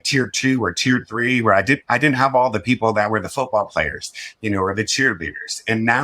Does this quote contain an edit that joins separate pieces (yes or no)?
no